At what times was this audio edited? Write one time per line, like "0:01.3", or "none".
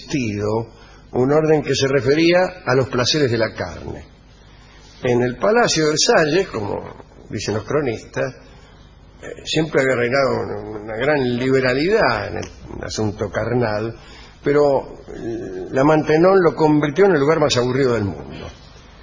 none